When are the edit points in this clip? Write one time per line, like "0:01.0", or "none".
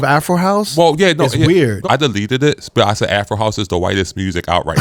none